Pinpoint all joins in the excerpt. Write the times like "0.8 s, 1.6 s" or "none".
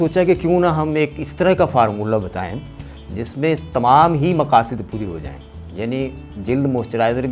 none